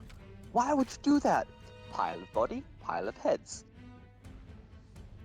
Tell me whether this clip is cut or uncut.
cut